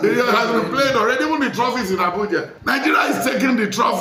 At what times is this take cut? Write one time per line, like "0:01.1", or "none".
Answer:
0:02.5